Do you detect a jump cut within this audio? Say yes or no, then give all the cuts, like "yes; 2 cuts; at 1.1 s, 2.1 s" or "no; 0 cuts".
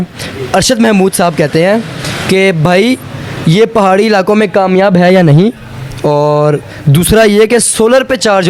no; 0 cuts